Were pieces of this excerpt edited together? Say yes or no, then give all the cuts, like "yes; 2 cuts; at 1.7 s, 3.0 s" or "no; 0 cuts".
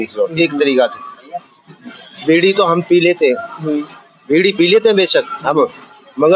no; 0 cuts